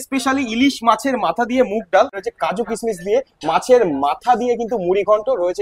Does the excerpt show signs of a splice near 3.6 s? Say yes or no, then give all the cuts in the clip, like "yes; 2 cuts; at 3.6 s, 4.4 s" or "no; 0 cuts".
no; 1 cut; at 2.2 s